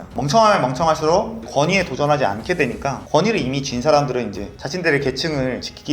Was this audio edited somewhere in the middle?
no; 0 cuts

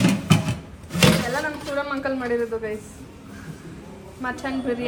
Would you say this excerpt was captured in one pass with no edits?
yes; 0 cuts

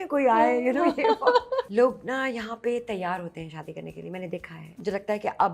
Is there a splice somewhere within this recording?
yes; 2 cuts; at 1.7 s, 4.6 s

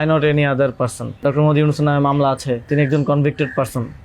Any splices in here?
yes; 2 cuts; at 1.2 s, 2.7 s

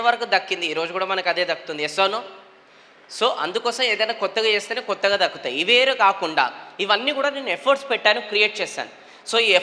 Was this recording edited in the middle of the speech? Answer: no; 0 cuts

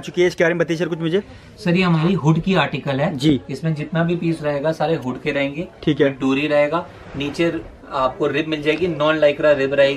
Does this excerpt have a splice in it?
no; 0 cuts

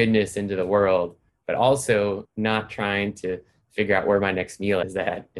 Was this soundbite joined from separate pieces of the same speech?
no; 0 cuts

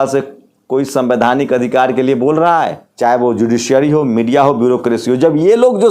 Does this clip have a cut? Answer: yes; 1 cut; at 2.8 s

